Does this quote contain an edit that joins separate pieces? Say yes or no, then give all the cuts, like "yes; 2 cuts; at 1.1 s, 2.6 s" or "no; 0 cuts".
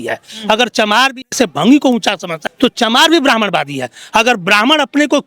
yes; 2 cuts; at 1.2 s, 2.4 s